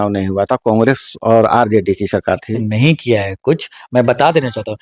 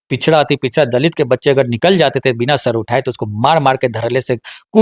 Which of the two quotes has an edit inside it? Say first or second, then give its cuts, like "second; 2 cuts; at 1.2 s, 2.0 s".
first; 1 cut; at 2.6 s